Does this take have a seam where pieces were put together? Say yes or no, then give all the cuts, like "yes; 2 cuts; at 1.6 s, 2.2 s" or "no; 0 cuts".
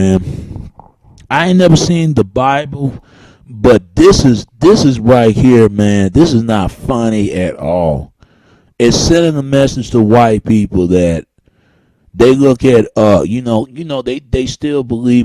no; 0 cuts